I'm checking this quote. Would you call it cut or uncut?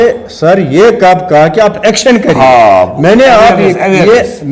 uncut